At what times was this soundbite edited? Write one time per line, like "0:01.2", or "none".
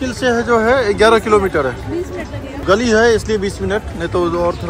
none